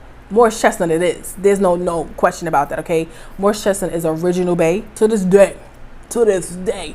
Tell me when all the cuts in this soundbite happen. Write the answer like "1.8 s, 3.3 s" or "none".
5.0 s